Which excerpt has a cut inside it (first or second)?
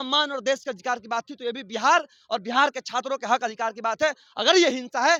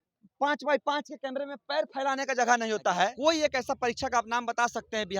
second